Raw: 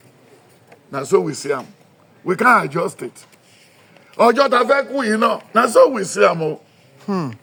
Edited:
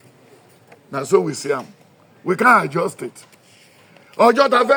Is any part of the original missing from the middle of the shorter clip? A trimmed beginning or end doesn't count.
no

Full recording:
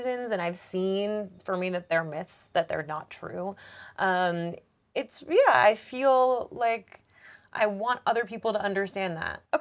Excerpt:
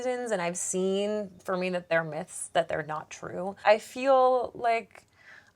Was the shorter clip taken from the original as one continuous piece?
no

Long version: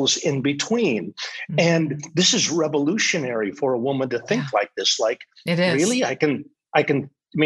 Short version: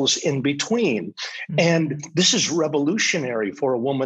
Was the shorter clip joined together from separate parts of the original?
no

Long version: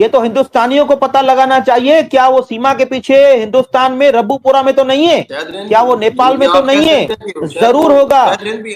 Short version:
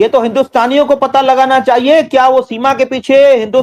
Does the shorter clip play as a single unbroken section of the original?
yes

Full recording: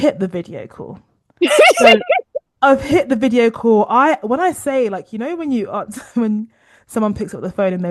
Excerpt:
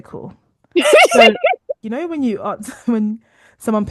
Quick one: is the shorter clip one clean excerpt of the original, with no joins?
no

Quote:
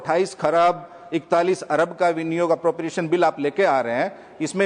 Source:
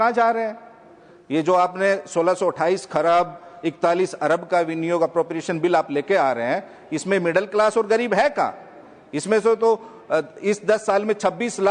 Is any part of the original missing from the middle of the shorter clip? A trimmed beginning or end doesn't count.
no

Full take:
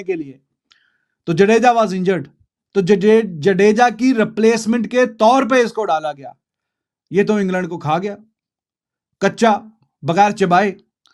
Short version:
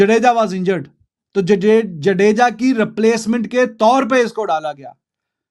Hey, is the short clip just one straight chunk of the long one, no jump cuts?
yes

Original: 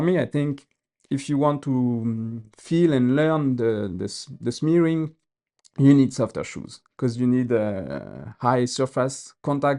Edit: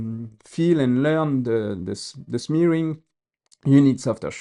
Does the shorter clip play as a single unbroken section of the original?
yes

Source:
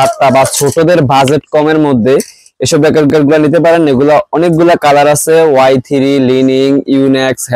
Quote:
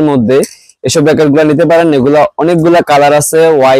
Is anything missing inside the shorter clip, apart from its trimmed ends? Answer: yes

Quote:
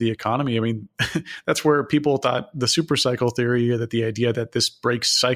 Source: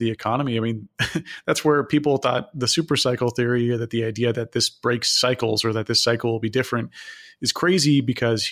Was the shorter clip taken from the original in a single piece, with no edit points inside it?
yes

